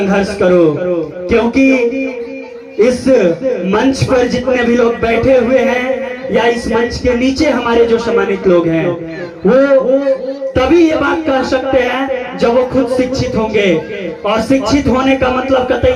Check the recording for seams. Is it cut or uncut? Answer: uncut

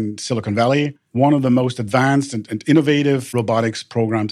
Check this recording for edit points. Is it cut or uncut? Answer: cut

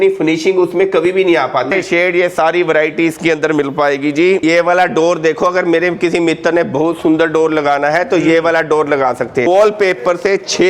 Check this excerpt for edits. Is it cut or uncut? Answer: cut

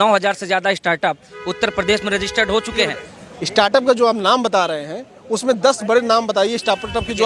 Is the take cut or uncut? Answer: cut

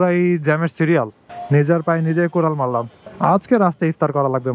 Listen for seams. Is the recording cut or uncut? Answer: cut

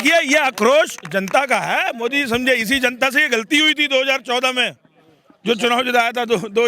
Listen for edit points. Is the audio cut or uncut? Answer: uncut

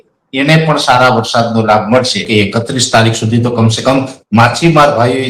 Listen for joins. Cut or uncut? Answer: cut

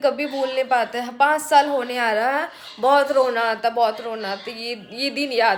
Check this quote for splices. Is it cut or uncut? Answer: uncut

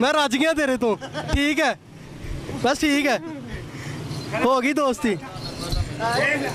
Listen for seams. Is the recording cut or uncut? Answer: uncut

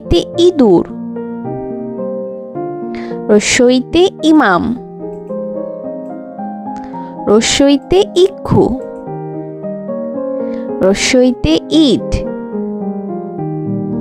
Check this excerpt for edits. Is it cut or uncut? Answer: cut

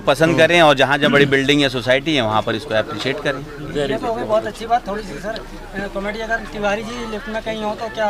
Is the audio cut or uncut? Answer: uncut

